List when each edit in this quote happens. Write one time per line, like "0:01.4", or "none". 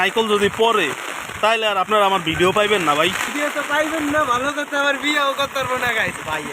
0:03.2